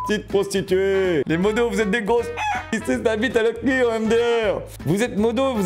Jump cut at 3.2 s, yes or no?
no